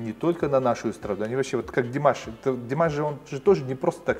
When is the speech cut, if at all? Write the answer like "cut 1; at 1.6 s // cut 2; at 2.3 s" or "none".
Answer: none